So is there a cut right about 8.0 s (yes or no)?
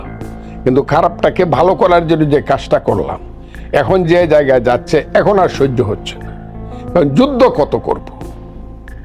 yes